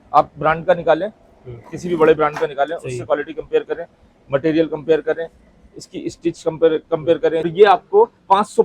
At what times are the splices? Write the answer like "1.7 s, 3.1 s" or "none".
7.5 s

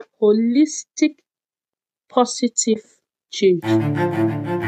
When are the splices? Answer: 3.6 s

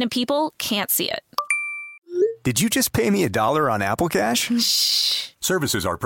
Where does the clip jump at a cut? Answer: none

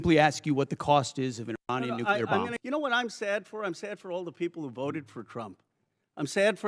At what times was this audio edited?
2.5 s

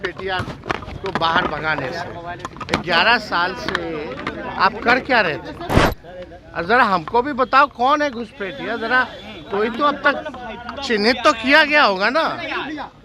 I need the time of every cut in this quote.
5.9 s

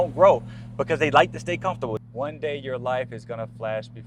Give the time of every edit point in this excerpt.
1.9 s

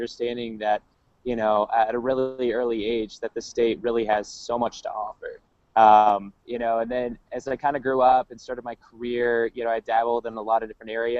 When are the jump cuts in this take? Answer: 1.5 s

